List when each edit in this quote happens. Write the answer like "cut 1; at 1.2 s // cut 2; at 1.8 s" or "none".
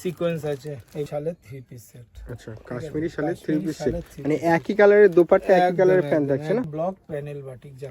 cut 1; at 1.1 s // cut 2; at 6.7 s